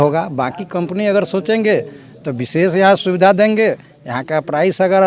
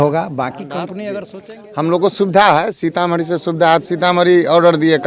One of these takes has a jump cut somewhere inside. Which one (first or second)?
second